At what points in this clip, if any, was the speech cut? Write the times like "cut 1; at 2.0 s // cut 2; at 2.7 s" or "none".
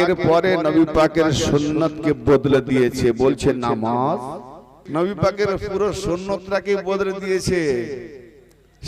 cut 1; at 4.7 s